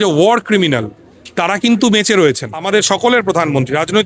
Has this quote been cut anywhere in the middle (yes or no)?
yes